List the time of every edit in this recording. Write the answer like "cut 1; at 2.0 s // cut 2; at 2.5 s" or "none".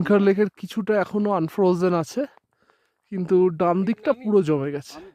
none

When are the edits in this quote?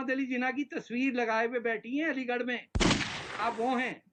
none

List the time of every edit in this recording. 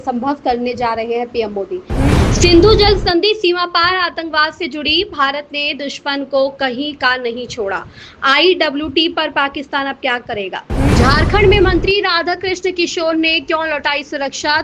cut 1; at 2.0 s // cut 2; at 10.8 s

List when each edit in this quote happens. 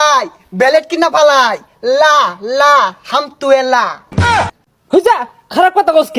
none

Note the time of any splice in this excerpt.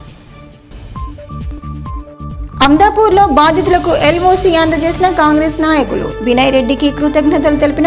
none

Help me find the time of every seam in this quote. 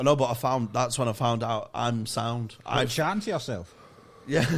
none

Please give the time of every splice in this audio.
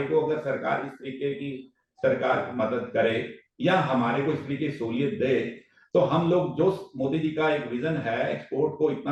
none

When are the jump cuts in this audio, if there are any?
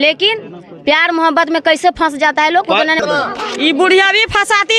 cut 1; at 3.0 s

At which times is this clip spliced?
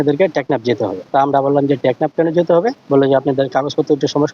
cut 1; at 1.0 s // cut 2; at 2.8 s

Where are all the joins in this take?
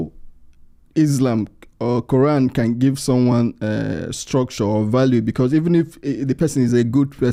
none

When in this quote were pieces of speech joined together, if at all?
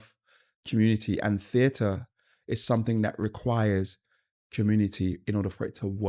none

